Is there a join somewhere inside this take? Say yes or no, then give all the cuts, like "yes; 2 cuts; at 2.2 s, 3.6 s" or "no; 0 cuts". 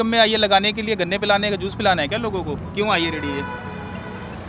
no; 0 cuts